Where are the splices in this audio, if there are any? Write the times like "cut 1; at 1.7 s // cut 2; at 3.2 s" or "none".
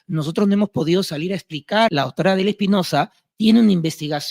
cut 1; at 1.9 s